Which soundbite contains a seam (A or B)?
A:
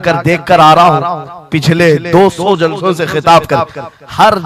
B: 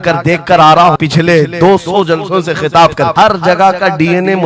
B